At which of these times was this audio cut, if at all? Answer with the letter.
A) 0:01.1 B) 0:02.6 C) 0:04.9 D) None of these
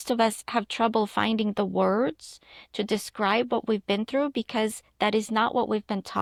D